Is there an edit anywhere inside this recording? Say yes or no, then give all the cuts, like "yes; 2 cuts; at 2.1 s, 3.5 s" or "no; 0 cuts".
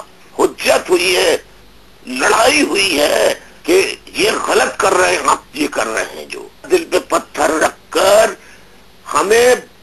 yes; 2 cuts; at 3.5 s, 6.6 s